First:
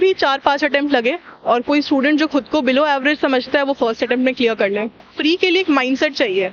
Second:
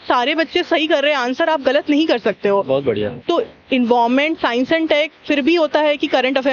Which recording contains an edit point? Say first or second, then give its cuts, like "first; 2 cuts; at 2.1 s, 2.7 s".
first; 1 cut; at 5.0 s